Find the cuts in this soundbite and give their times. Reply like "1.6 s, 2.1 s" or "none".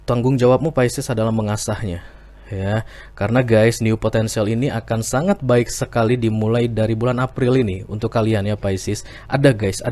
none